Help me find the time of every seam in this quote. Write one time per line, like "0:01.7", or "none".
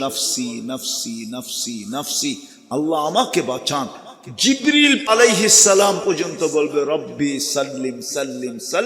0:05.1